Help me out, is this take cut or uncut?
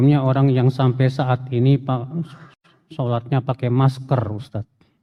uncut